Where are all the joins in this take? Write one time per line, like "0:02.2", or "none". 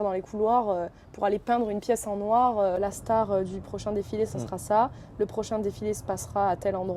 0:02.8